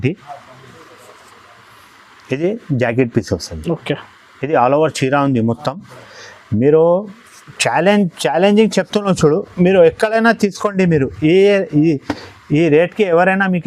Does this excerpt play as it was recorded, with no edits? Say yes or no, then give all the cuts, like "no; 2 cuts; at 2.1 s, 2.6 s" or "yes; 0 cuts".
yes; 0 cuts